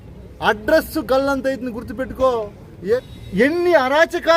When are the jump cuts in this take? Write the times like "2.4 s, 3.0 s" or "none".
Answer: 3.0 s